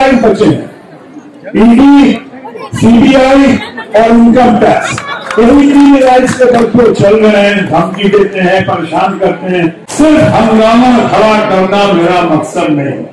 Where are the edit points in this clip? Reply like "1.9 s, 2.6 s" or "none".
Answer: 9.8 s